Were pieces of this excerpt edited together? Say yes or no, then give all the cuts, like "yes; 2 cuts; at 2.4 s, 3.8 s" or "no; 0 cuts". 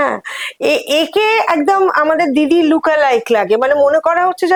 no; 0 cuts